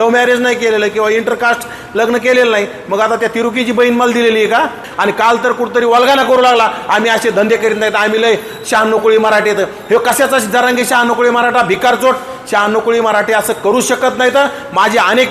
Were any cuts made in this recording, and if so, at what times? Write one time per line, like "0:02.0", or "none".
0:04.8